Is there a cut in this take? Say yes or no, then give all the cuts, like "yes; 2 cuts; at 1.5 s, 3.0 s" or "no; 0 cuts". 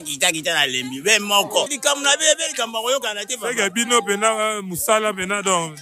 yes; 1 cut; at 1.7 s